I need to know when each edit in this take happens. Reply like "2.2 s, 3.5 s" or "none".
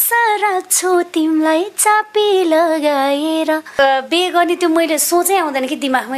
3.8 s